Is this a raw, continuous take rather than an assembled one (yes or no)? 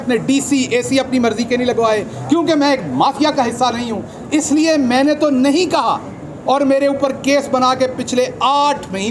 yes